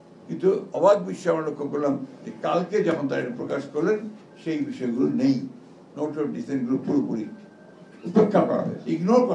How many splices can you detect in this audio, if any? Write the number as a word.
zero